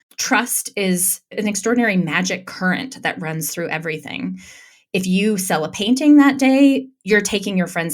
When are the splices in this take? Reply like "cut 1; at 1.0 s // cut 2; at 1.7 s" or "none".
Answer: cut 1; at 1.2 s